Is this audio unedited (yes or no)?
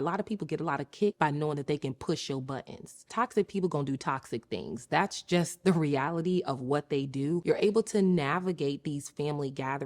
no